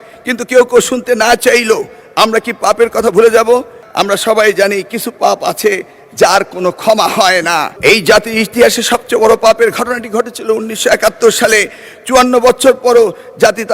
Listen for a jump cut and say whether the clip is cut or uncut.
cut